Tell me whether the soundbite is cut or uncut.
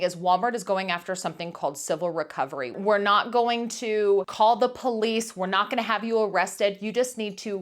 cut